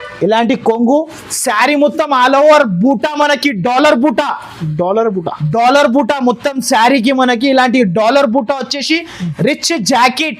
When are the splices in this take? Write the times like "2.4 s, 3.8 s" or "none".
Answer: none